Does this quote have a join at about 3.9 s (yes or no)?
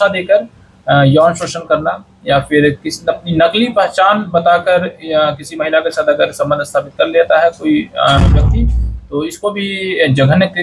no